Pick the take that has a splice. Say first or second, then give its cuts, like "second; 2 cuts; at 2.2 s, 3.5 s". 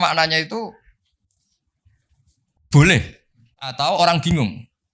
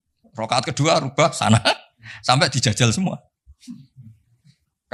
first; 1 cut; at 3.7 s